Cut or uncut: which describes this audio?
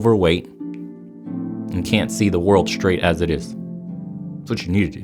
uncut